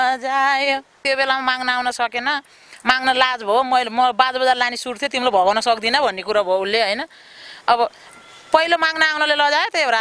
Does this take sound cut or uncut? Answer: cut